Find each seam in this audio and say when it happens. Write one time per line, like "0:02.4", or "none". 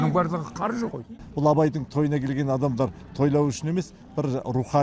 0:01.1